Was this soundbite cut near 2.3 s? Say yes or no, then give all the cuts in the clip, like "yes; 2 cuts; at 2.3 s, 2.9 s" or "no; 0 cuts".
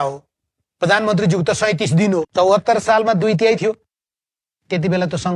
yes; 1 cut; at 2.3 s